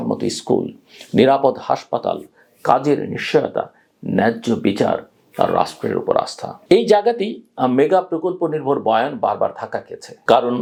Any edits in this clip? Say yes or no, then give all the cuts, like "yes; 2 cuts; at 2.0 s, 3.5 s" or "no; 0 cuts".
no; 0 cuts